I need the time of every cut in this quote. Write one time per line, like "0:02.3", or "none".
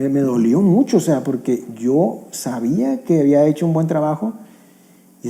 none